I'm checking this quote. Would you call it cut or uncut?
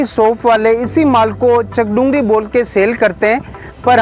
uncut